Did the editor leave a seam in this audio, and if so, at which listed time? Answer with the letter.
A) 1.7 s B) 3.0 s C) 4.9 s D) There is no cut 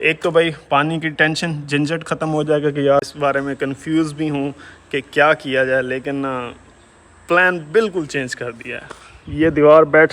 B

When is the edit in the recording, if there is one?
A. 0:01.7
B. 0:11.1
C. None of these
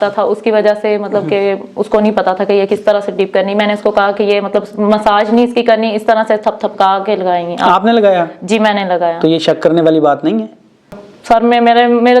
B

